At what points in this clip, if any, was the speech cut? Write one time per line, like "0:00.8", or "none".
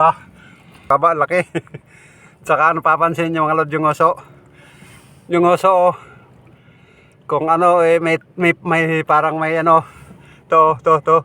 0:00.9